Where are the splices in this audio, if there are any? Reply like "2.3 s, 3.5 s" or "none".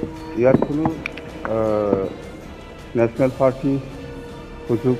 none